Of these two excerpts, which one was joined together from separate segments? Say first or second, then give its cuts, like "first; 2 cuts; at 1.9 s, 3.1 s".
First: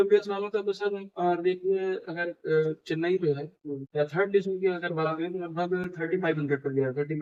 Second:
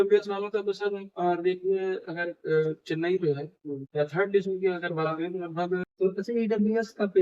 second; 1 cut; at 5.9 s